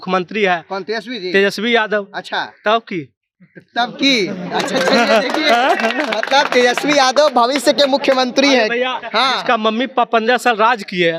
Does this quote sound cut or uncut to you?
uncut